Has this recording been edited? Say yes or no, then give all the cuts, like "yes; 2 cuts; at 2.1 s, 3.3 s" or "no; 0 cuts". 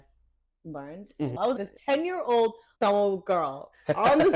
yes; 2 cuts; at 1.6 s, 2.6 s